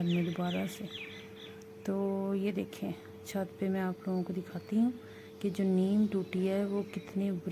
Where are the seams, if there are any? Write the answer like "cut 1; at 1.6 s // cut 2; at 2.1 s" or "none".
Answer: none